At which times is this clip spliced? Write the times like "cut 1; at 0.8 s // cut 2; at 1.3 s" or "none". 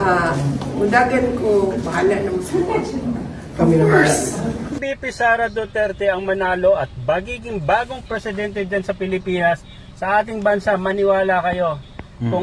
cut 1; at 4.7 s